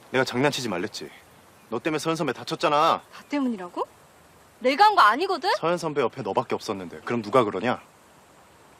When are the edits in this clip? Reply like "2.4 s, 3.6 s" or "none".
5.8 s